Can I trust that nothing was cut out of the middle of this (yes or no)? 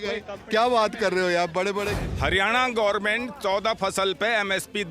no